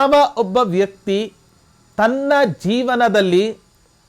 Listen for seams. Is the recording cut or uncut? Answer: uncut